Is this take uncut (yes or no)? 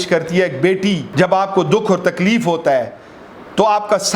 no